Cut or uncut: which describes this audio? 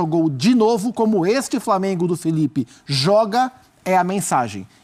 uncut